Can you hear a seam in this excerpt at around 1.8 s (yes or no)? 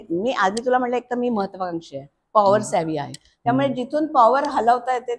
no